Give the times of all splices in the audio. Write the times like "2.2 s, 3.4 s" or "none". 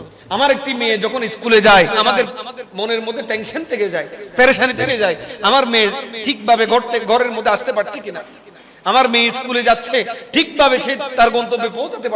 2.0 s